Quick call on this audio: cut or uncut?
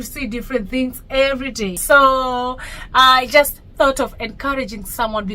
cut